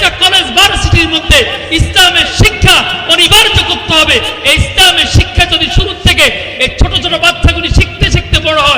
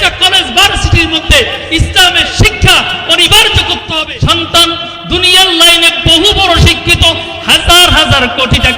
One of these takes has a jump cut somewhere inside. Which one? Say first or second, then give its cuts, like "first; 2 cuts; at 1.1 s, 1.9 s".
second; 1 cut; at 4.0 s